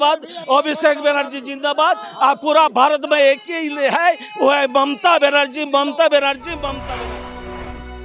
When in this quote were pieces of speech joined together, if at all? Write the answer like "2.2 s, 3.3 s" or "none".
6.9 s